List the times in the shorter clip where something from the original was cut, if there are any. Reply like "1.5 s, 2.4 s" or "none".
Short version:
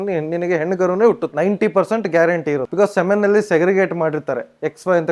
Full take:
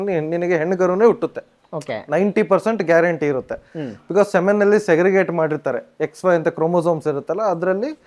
1.3 s, 2.7 s